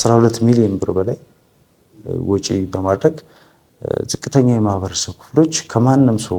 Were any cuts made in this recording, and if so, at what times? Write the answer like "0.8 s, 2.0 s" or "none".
none